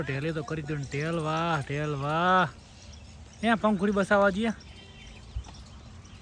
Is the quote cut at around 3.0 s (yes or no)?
no